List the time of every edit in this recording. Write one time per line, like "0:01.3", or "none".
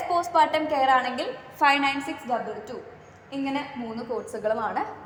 none